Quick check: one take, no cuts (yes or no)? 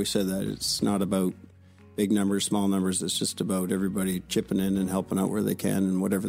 yes